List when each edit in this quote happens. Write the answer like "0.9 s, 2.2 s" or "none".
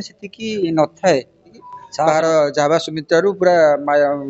2.1 s

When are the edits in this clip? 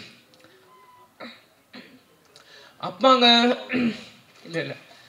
none

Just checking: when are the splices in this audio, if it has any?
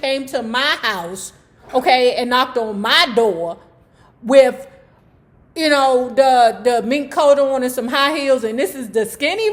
none

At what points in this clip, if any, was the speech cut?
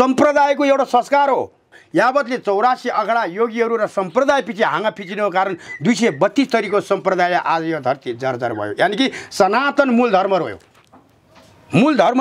1.8 s

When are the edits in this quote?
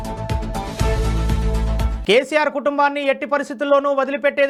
none

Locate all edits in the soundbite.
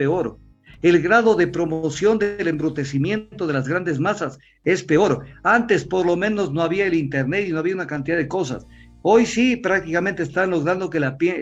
none

